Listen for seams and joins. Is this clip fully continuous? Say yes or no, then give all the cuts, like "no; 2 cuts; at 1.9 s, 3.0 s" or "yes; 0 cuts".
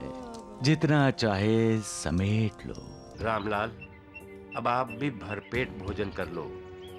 no; 1 cut; at 3.0 s